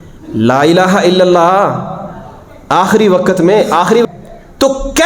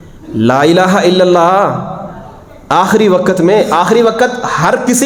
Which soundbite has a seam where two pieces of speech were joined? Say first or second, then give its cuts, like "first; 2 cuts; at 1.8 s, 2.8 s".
first; 1 cut; at 4.0 s